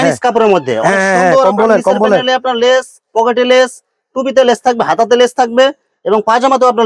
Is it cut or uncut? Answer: uncut